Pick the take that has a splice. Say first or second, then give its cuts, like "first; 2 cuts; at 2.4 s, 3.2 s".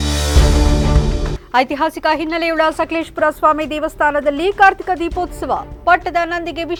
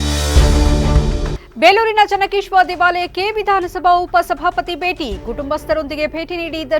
second; 1 cut; at 0.9 s